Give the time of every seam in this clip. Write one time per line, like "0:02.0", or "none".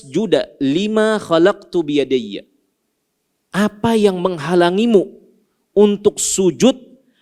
none